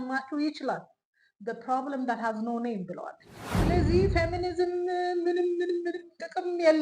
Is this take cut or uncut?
cut